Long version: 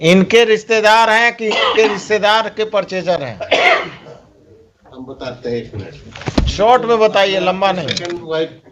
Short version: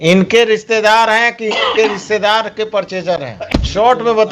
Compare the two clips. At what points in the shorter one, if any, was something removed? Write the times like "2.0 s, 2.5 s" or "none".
3.4 s